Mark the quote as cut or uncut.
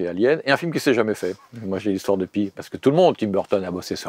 uncut